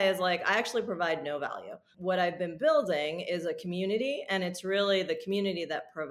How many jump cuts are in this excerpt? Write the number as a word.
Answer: one